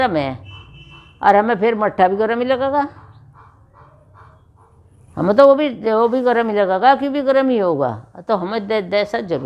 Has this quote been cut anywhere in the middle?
no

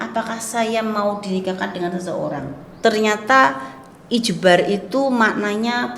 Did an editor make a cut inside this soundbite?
yes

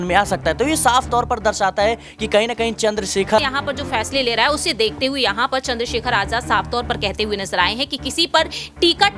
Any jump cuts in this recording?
yes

